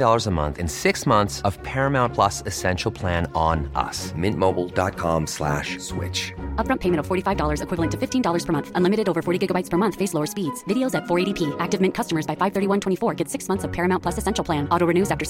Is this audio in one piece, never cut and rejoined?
yes; 0 cuts

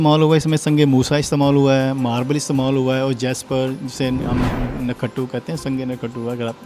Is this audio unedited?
yes; 0 cuts

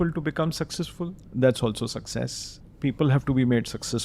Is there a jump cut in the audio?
yes; 1 cut; at 2.6 s

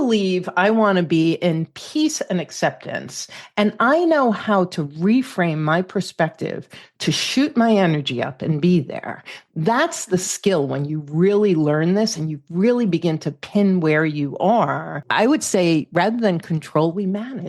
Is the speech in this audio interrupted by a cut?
yes; 1 cut; at 15.0 s

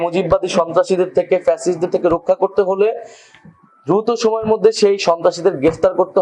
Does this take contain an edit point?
no; 0 cuts

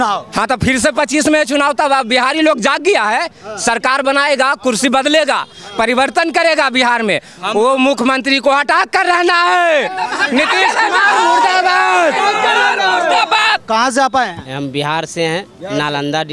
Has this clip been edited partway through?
no; 0 cuts

